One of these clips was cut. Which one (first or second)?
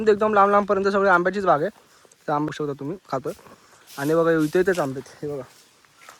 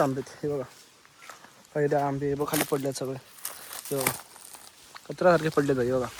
first